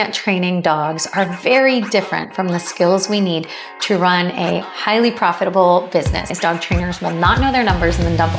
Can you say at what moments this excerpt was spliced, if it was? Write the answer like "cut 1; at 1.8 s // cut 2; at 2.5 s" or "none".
cut 1; at 6.3 s